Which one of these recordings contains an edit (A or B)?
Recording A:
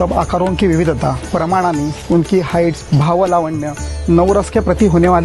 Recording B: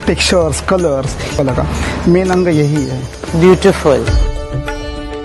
B